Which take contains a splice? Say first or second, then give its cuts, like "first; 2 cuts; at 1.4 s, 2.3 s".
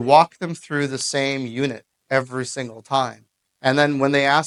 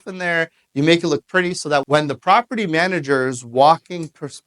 second; 1 cut; at 1.8 s